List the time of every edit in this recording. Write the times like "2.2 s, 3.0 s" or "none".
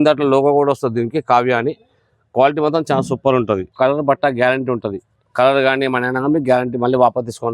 3.7 s

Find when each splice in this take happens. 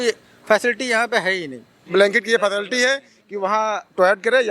1.8 s

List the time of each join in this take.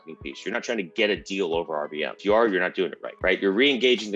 2.1 s, 3.0 s

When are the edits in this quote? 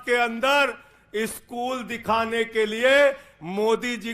none

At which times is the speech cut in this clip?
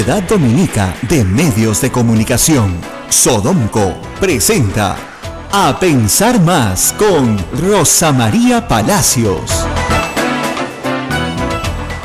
none

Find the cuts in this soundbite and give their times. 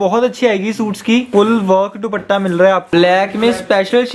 1.3 s, 2.9 s

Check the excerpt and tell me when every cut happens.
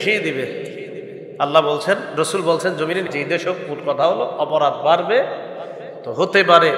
3.1 s

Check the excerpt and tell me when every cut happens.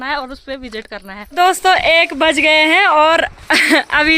1.2 s

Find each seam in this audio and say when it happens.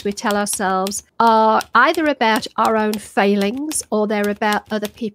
1.0 s

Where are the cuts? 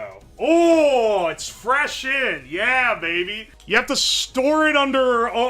3.5 s

